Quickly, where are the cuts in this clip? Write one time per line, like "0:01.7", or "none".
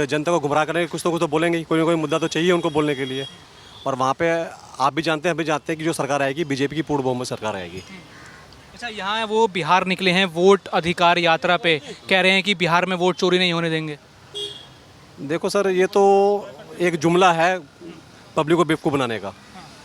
none